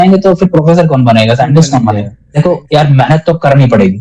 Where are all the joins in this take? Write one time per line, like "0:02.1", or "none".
0:02.2